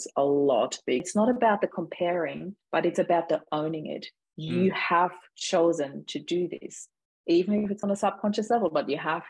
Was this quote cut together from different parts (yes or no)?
yes